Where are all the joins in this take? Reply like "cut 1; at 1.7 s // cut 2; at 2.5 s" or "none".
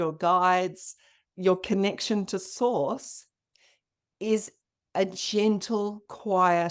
none